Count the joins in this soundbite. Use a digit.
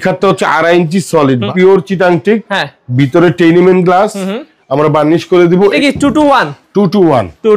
2